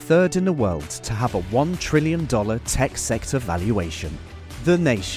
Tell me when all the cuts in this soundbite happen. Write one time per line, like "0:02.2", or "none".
none